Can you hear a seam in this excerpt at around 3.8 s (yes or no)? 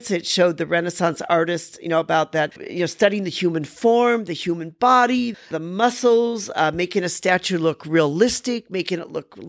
no